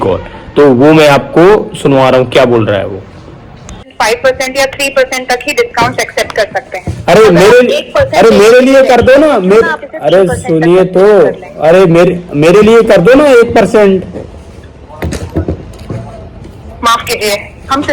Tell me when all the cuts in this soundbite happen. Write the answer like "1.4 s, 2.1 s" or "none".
3.9 s